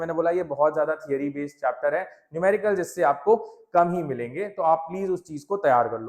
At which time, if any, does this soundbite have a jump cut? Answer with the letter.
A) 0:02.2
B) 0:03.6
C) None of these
C